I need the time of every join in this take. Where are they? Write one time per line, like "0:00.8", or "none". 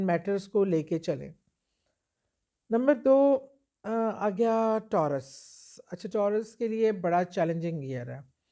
none